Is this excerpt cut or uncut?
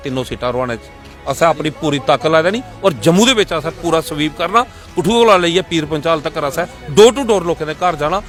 uncut